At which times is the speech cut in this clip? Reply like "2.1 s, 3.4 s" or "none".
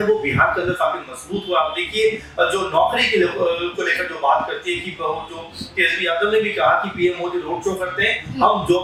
none